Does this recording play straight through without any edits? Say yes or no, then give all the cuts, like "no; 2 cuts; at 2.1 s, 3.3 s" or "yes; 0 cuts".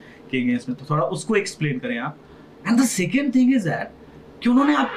yes; 0 cuts